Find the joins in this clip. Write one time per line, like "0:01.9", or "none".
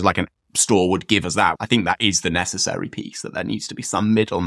0:01.6